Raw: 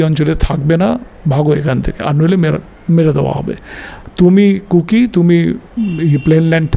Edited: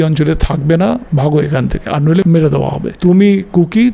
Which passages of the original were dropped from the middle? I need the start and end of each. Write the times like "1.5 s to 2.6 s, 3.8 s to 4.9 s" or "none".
1.1 s to 1.2 s, 2.4 s to 3.5 s